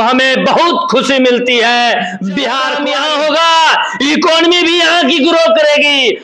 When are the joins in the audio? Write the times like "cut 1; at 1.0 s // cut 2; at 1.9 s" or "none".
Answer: cut 1; at 2.8 s